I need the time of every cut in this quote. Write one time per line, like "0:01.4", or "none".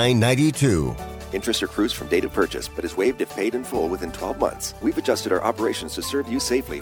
0:04.7

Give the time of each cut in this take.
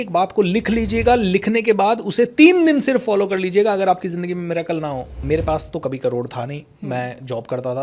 0:05.2

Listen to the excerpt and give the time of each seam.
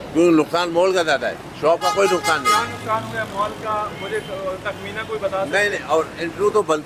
none

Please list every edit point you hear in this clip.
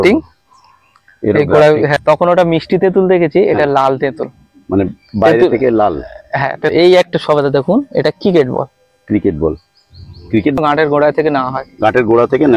0:01.9
0:06.7
0:10.6

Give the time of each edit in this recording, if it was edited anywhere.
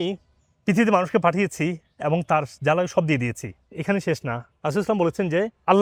none

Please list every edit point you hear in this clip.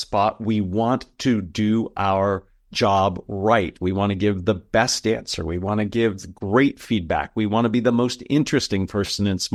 none

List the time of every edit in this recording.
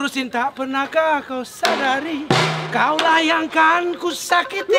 none

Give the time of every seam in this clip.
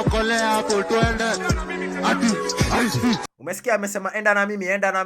0:01.1

